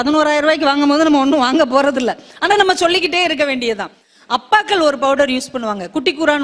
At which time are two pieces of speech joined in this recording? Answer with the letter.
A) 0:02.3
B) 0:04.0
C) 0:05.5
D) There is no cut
B